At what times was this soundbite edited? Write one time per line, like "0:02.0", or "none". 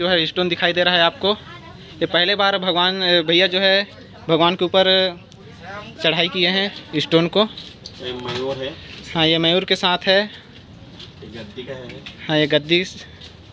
none